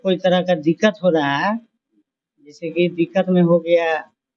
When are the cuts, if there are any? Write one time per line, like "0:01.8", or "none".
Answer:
none